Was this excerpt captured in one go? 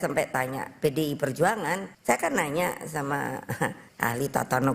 no; 2 cuts; at 1.9 s, 3.8 s

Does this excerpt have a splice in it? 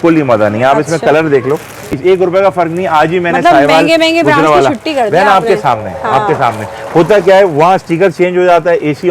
yes; 1 cut; at 2.0 s

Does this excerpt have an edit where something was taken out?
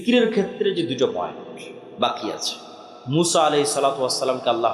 no; 0 cuts

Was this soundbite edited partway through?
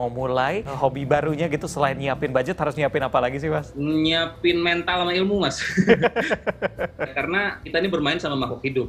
yes; 3 cuts; at 0.8 s, 3.7 s, 7.1 s

